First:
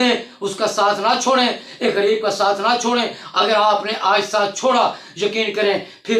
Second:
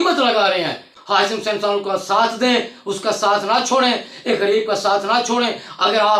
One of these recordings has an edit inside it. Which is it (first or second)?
second